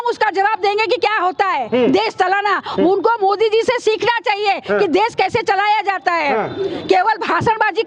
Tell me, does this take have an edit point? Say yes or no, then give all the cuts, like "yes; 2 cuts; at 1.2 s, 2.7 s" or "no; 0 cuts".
no; 0 cuts